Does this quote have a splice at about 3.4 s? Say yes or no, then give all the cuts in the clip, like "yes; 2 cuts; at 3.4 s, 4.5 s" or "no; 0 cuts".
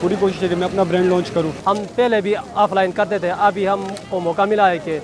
no; 1 cut; at 1.5 s